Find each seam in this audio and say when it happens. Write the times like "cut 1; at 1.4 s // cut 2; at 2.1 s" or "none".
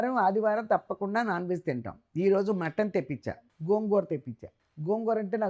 none